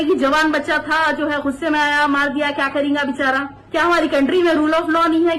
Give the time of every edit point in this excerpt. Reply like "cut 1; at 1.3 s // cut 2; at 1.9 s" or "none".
cut 1; at 3.6 s